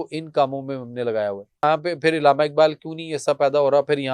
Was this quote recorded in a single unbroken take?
no; 1 cut; at 1.6 s

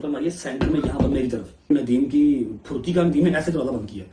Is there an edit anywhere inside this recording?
yes; 1 cut; at 1.7 s

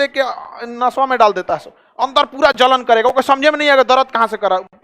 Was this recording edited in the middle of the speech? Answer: no; 0 cuts

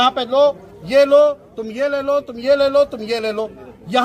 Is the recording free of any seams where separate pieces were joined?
yes; 0 cuts

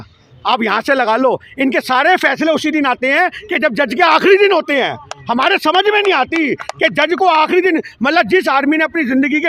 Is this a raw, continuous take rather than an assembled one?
yes; 0 cuts

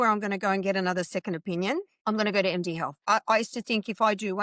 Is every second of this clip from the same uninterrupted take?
no; 2 cuts; at 1.9 s, 2.9 s

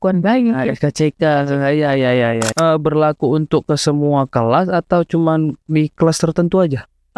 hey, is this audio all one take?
no; 1 cut; at 2.5 s

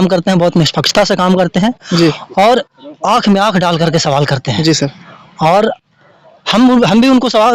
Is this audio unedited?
yes; 0 cuts

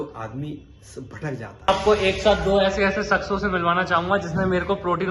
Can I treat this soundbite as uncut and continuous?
no; 1 cut; at 1.7 s

